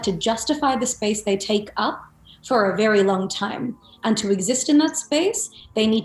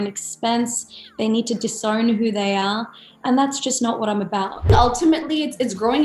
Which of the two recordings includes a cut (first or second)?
second